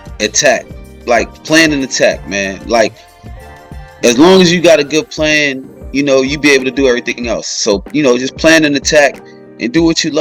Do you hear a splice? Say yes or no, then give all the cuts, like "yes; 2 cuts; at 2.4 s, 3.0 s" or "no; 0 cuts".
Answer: no; 0 cuts